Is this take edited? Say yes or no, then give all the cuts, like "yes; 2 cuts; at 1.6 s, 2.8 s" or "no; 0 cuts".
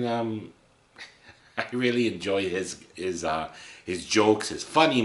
no; 0 cuts